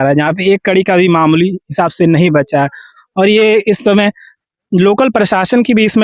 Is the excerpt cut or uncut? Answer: uncut